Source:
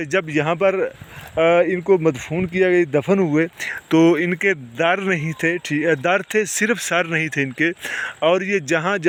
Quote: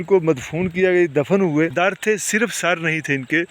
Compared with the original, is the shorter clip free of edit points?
no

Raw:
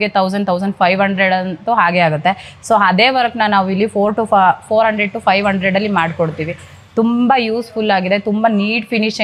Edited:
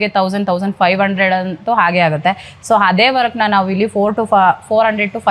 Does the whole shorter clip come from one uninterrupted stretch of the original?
yes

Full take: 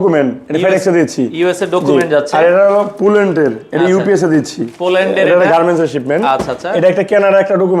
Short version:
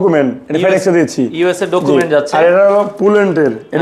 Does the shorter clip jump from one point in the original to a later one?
no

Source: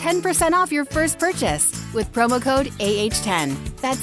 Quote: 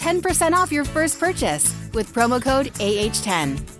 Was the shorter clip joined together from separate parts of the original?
no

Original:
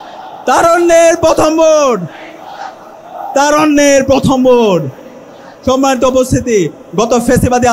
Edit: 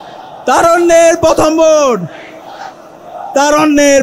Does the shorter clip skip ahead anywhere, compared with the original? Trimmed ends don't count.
no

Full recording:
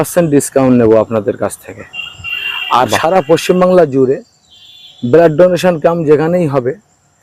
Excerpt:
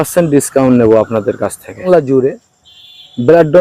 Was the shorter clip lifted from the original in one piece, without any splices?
no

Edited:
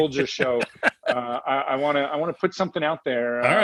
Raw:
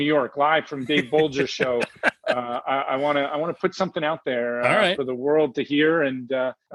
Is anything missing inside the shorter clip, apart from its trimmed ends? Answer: no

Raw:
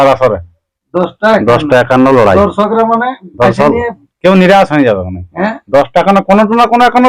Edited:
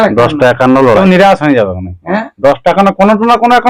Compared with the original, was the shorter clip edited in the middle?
yes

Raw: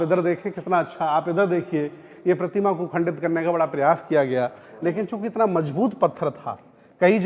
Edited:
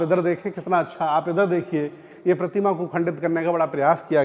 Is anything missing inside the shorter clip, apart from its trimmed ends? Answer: no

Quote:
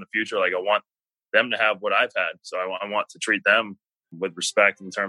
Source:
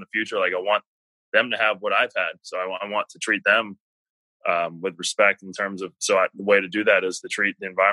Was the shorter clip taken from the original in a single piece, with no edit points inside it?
no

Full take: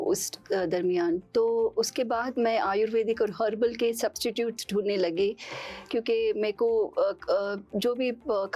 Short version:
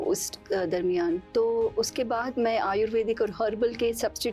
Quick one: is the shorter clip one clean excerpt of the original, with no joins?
yes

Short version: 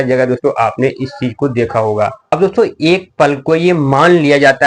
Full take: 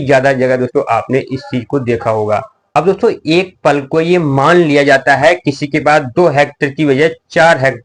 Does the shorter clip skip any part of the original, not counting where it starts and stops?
yes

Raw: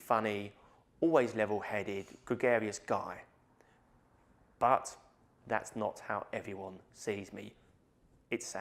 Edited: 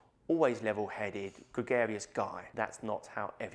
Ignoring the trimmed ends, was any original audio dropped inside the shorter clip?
yes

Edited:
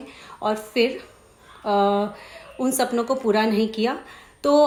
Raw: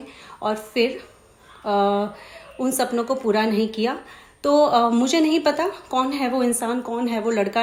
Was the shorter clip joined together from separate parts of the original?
no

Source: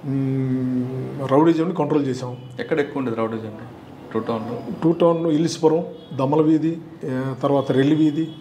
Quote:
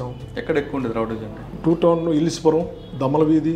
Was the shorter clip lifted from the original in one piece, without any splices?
no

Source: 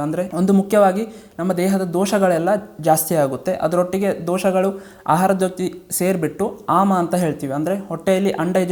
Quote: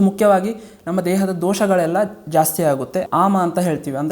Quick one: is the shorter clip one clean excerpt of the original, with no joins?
no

